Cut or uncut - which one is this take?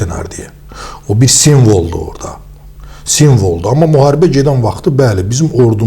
uncut